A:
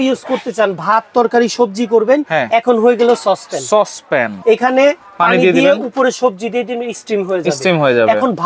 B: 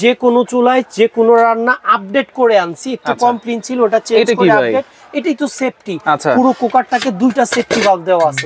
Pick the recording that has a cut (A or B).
A